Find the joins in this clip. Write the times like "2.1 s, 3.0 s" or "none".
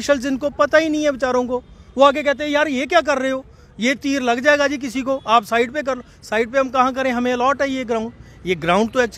none